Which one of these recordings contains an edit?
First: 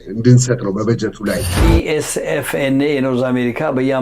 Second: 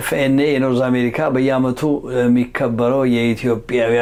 first; 1 cut; at 1.5 s

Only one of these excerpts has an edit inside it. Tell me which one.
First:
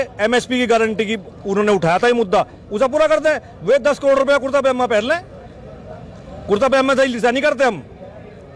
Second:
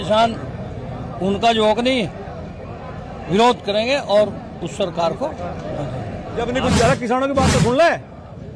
second; 1 cut; at 6.3 s

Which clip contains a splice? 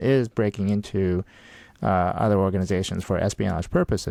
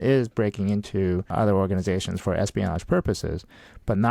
second; 1 cut; at 1.3 s

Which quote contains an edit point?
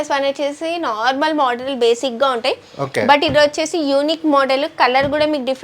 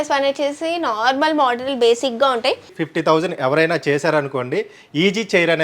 second; 1 cut; at 2.7 s

